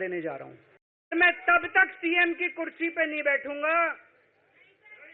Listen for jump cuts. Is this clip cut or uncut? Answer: cut